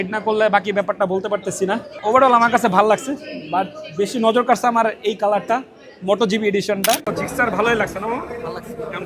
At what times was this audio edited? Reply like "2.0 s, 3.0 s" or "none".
1.9 s, 7.1 s